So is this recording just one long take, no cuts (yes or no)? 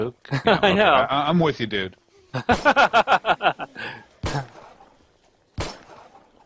yes